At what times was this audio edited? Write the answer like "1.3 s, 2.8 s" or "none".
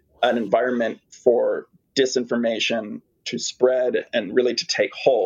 4.1 s